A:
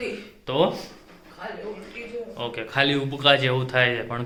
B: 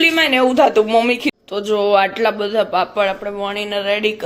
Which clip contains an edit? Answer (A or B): B